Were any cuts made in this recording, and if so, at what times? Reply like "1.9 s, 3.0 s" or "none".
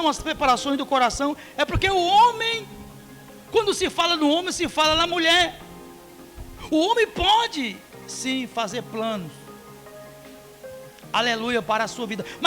9.4 s, 10.9 s